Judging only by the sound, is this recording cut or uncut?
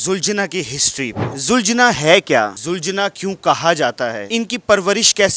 cut